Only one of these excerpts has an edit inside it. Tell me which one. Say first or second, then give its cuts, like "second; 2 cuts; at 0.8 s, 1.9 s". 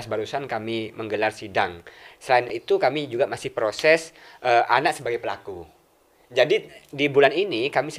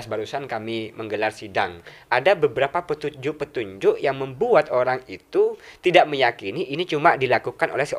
second; 1 cut; at 1.9 s